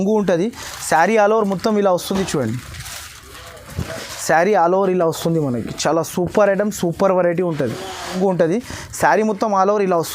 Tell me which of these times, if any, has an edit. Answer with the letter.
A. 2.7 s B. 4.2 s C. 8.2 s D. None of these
C